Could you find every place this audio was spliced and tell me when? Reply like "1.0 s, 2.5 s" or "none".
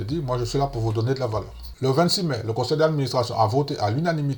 1.7 s